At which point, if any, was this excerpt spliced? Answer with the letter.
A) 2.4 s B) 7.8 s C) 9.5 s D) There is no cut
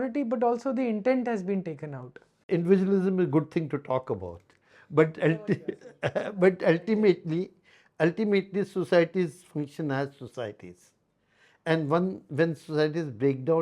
A